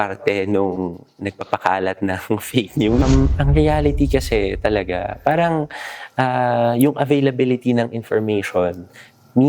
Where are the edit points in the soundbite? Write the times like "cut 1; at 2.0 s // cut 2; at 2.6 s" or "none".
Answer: cut 1; at 3.0 s